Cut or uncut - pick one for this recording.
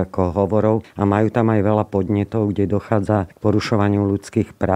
cut